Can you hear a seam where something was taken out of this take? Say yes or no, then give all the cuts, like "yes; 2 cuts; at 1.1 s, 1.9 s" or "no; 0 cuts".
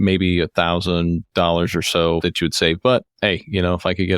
yes; 1 cut; at 1.2 s